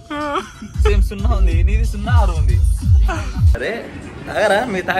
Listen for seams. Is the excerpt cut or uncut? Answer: cut